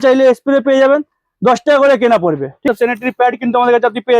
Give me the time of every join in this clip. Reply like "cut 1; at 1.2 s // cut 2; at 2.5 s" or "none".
cut 1; at 2.6 s

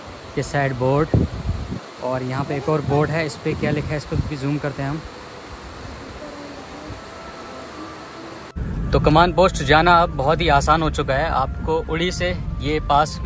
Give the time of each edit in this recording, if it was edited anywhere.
cut 1; at 8.5 s

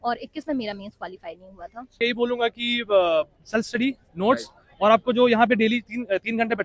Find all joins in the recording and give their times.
cut 1; at 2.0 s

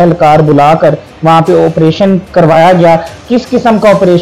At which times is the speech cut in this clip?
none

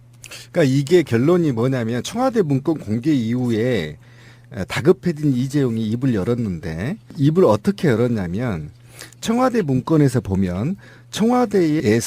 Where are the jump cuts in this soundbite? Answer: cut 1; at 2.3 s

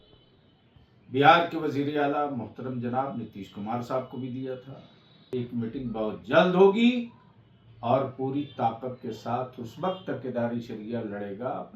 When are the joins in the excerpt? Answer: cut 1; at 5.3 s

